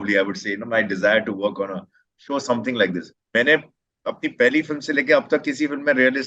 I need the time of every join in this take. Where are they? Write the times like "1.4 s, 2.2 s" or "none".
3.1 s